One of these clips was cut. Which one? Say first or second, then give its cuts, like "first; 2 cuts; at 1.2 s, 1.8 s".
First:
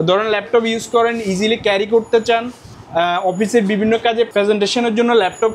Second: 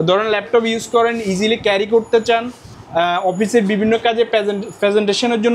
first; 1 cut; at 4.3 s